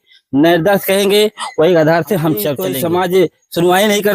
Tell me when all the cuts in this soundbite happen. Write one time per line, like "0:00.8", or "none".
0:02.6